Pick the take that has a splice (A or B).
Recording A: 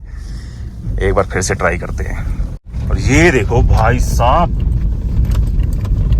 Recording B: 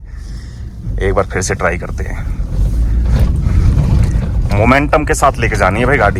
A